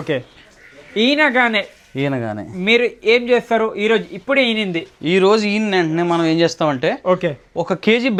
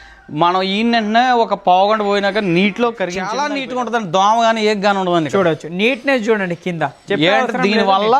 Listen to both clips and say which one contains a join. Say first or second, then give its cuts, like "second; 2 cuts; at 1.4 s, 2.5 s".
second; 1 cut; at 3.3 s